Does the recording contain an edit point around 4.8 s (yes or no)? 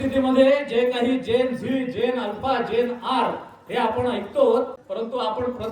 yes